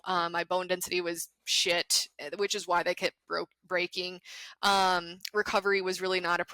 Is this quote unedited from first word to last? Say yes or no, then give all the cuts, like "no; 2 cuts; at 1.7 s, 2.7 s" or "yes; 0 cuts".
yes; 0 cuts